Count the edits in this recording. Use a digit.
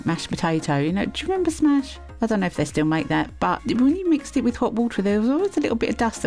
2